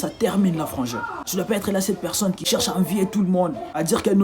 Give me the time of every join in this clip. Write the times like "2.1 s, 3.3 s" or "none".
2.4 s